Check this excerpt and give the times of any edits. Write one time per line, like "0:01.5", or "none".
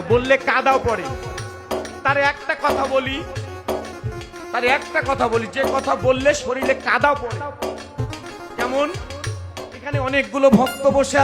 none